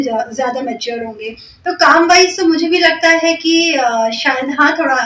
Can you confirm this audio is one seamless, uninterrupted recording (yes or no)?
yes